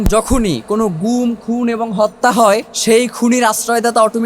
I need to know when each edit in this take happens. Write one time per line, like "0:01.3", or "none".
0:02.7